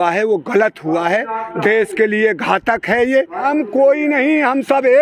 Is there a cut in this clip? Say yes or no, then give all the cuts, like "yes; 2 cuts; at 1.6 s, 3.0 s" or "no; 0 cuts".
yes; 1 cut; at 3.5 s